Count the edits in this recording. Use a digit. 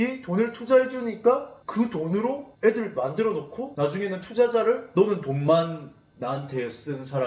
1